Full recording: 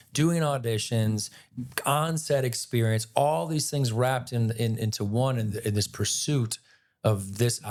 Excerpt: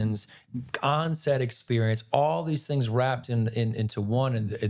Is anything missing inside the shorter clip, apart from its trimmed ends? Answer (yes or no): no